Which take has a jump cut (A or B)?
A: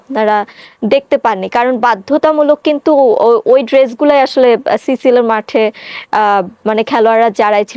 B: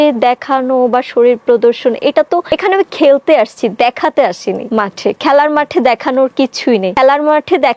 B